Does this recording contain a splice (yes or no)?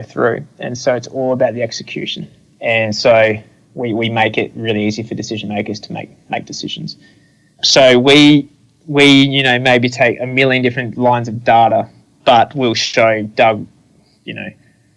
yes